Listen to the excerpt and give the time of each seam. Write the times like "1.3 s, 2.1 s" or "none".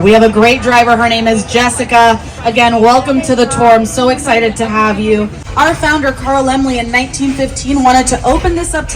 none